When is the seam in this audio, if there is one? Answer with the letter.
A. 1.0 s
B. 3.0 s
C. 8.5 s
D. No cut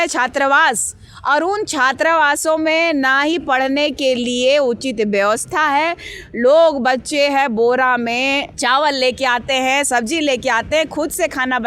C